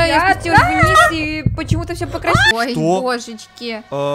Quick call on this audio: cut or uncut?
cut